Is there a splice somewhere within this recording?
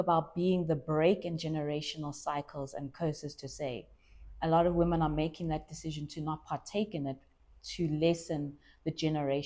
no; 0 cuts

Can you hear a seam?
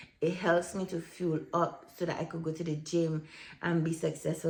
no; 0 cuts

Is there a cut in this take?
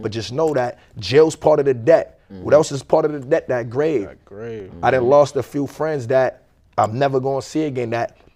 no; 0 cuts

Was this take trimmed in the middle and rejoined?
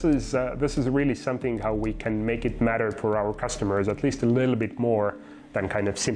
no; 0 cuts

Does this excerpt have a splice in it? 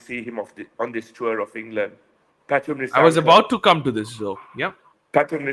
no; 0 cuts

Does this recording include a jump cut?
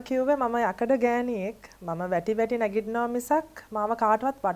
no; 0 cuts

